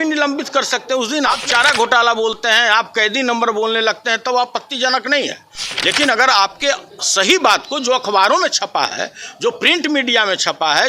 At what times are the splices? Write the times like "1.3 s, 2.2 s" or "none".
1.4 s